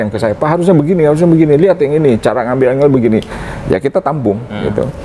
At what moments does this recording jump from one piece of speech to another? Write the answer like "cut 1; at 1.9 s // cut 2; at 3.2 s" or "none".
none